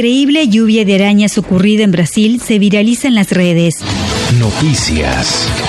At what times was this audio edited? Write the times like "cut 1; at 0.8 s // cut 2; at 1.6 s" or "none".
cut 1; at 3.9 s